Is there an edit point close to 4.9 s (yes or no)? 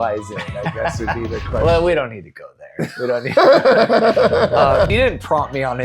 yes